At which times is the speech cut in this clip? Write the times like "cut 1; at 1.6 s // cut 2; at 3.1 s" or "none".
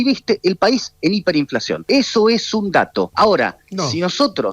cut 1; at 1.7 s // cut 2; at 3.1 s